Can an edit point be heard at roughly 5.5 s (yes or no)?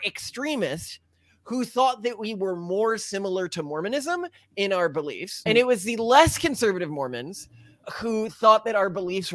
yes